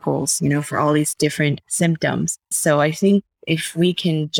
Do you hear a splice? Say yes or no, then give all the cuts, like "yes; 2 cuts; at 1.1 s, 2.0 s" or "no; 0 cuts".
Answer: yes; 2 cuts; at 1.6 s, 2.5 s